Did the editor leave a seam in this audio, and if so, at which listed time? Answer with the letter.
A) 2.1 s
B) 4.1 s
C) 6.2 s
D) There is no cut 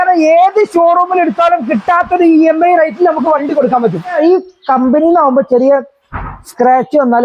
B